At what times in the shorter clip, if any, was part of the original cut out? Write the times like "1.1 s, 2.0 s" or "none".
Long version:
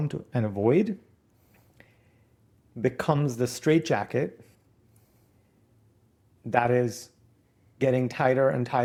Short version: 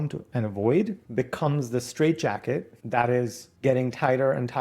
1.0 s, 2.8 s, 3.4 s